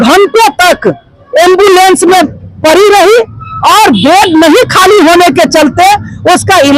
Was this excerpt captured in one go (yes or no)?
yes